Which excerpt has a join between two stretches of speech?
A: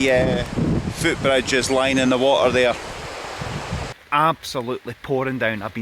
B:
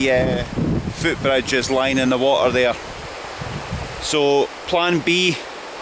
A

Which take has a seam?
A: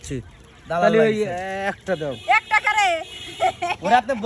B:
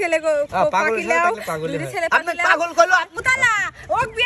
B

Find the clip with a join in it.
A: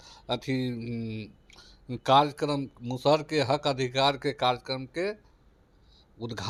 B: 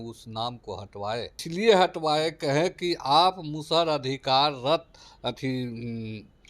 B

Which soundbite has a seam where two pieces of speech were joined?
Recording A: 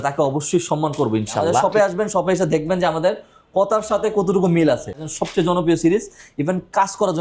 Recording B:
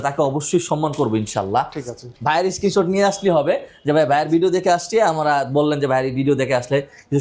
A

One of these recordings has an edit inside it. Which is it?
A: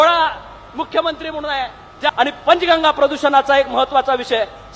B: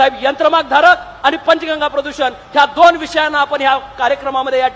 A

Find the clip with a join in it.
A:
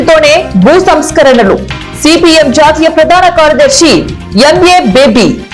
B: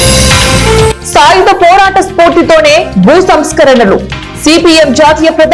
B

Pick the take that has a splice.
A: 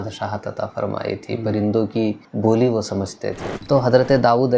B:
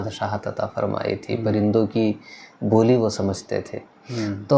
A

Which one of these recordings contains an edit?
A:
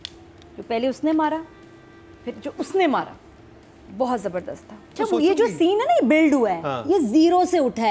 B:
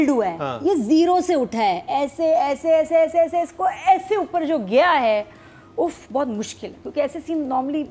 A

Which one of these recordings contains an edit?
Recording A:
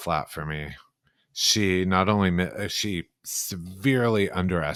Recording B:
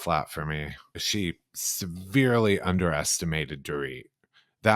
B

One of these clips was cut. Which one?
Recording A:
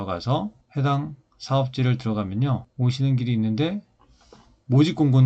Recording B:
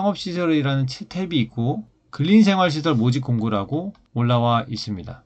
A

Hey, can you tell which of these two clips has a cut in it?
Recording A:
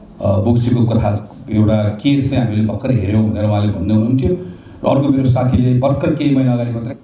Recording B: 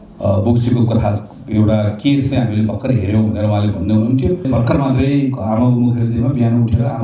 B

